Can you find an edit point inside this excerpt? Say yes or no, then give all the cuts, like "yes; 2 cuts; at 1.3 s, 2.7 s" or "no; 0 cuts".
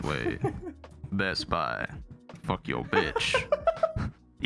no; 0 cuts